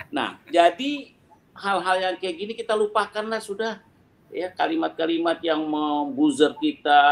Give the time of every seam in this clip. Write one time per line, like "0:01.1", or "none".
none